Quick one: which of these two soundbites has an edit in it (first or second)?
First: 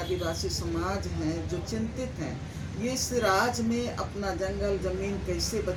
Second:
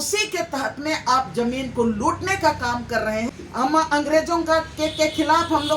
second